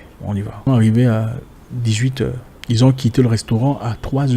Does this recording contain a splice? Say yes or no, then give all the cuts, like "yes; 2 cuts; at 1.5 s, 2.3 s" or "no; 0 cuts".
yes; 2 cuts; at 0.7 s, 2.5 s